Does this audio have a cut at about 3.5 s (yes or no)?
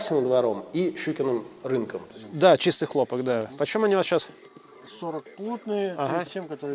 no